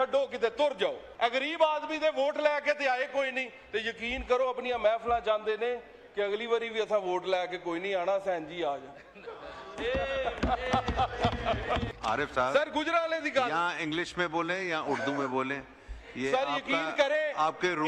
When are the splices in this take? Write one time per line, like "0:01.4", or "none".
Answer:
0:01.0
0:11.9